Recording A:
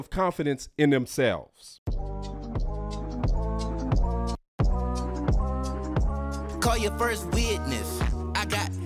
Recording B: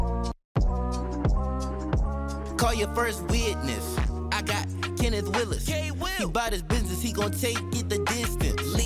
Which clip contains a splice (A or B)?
A